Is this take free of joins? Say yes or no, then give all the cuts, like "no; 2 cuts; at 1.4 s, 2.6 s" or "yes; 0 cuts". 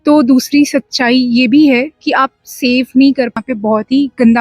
no; 1 cut; at 3.4 s